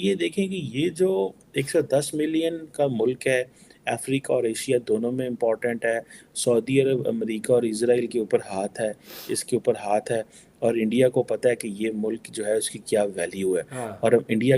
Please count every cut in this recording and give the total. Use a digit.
0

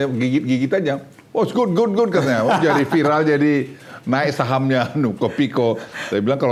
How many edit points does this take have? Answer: 0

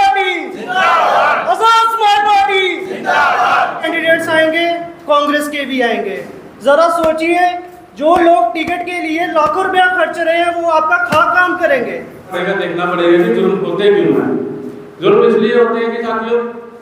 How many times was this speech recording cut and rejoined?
2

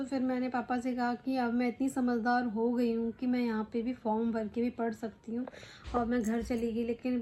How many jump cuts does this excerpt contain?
0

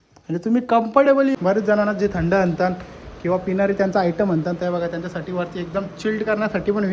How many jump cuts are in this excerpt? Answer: 1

